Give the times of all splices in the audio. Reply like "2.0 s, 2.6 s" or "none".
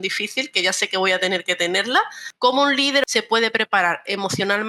2.2 s, 3.0 s